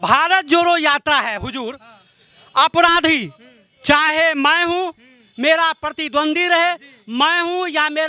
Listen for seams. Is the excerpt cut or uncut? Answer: uncut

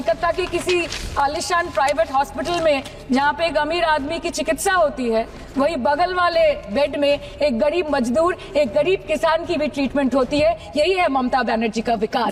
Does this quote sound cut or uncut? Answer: uncut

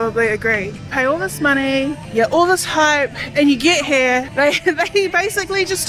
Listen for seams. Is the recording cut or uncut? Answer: uncut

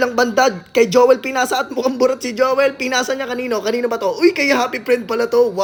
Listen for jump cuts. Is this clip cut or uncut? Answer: uncut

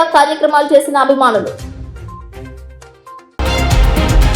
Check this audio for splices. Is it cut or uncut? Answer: cut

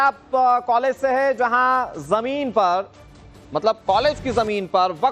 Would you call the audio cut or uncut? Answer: cut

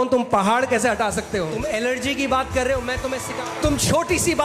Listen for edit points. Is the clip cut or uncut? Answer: cut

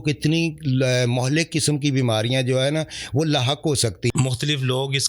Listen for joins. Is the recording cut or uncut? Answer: cut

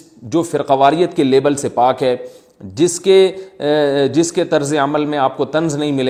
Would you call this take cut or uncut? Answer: uncut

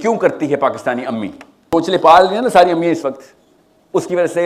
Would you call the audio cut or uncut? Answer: cut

